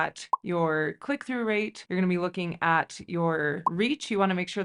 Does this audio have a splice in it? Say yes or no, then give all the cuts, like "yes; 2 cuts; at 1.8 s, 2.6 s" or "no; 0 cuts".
no; 0 cuts